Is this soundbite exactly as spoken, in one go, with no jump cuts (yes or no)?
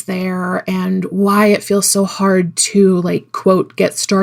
yes